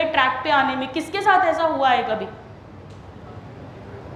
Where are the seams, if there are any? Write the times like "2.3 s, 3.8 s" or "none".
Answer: none